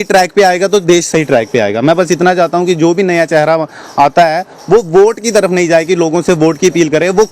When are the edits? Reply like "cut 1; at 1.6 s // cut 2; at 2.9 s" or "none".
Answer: none